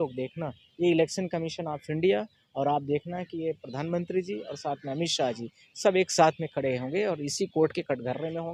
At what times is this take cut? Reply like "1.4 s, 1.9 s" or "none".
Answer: none